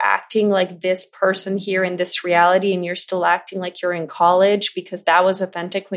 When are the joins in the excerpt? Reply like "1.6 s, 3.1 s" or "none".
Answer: none